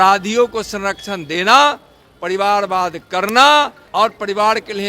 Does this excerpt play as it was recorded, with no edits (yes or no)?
no